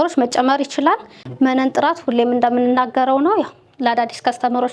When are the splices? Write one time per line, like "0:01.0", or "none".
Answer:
0:01.2

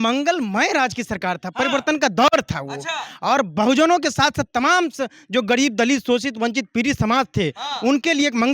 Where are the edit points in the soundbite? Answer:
none

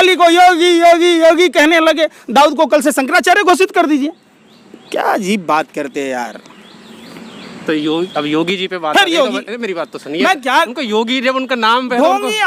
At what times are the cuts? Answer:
none

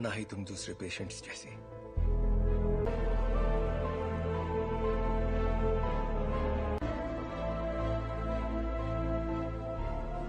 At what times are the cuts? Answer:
0:02.9

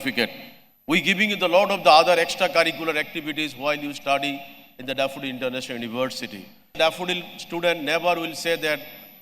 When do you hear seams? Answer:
0:06.8

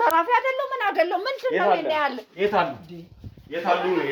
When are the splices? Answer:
none

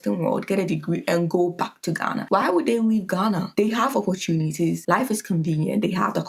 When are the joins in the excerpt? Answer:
none

